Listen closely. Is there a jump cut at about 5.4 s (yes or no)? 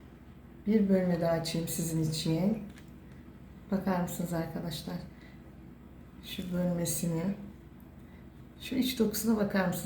yes